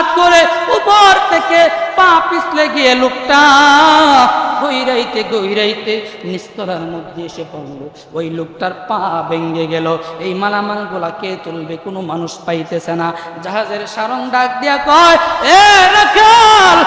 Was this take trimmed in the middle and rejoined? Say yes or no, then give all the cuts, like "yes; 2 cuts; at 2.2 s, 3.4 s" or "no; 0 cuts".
no; 0 cuts